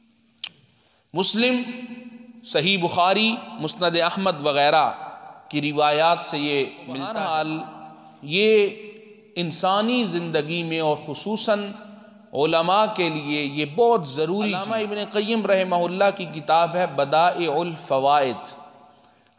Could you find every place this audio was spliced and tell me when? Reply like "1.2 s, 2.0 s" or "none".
7.1 s, 14.7 s